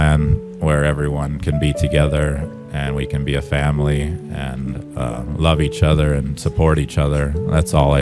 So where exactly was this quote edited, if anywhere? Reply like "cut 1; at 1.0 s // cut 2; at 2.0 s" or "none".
none